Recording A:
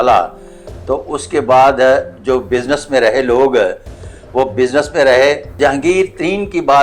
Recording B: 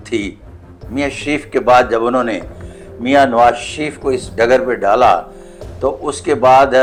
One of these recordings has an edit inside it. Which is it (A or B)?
A